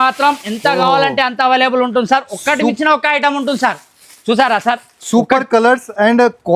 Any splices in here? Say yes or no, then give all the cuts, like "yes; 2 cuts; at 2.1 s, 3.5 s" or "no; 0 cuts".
no; 0 cuts